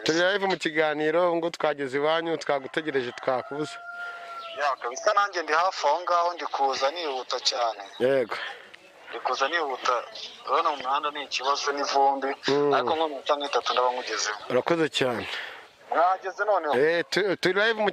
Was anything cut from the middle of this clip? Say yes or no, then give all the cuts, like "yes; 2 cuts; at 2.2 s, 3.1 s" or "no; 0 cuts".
no; 0 cuts